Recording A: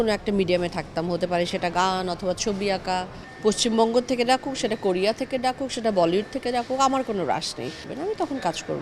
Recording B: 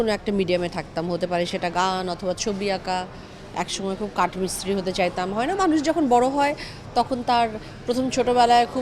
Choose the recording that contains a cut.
A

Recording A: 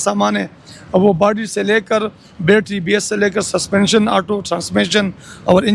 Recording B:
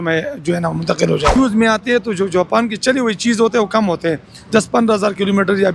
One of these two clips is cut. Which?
B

